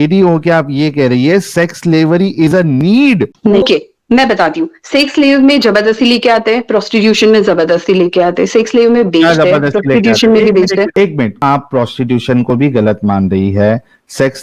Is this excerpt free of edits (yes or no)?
no